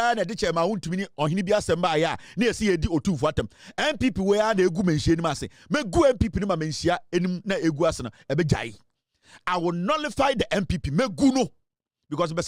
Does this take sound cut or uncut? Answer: uncut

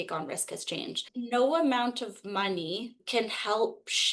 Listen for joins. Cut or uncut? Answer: cut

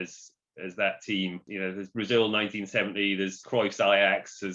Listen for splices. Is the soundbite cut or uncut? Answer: cut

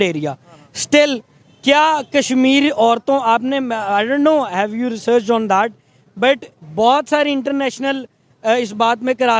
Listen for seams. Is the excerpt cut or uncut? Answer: uncut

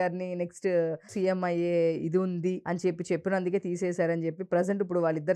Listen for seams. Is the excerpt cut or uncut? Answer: cut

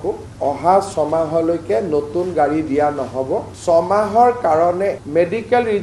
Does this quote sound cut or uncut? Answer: cut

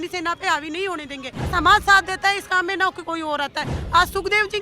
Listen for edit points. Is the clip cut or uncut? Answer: cut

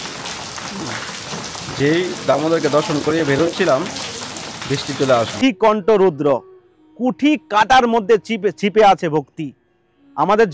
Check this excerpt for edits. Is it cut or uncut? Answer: cut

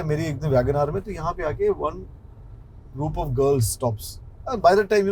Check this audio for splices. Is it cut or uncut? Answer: uncut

